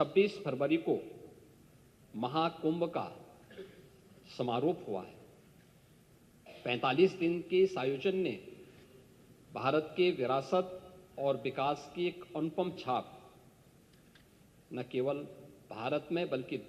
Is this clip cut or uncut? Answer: uncut